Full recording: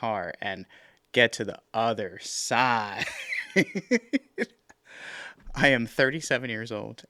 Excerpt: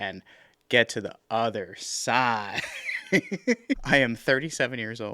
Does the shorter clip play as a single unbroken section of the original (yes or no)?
no